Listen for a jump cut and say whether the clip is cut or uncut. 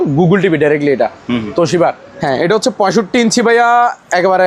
cut